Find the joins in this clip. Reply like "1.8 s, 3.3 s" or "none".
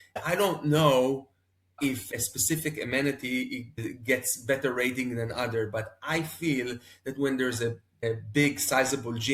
3.8 s, 8.0 s